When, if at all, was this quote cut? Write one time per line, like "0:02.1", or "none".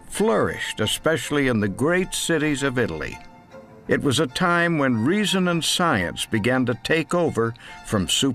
0:03.1